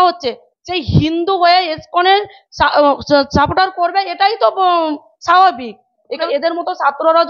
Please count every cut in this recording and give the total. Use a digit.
1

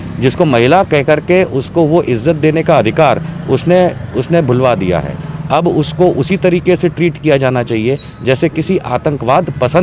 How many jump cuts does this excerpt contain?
0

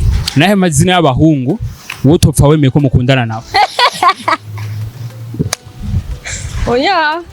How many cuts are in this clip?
0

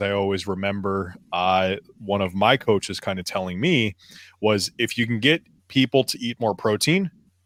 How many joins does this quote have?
0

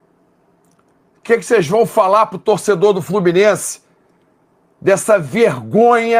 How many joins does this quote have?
0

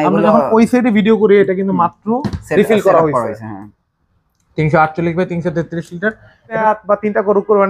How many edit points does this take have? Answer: 1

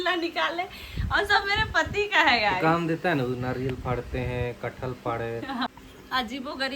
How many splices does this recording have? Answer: 1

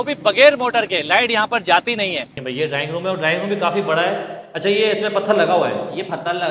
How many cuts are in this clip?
1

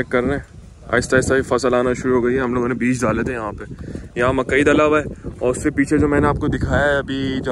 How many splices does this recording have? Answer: 0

